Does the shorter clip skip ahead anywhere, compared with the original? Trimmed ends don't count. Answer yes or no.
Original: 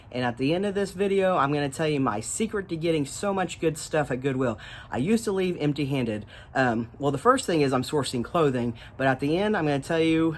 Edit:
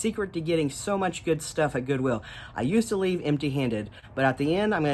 yes